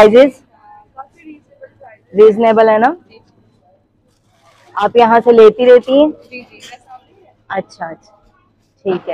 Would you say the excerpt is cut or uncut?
uncut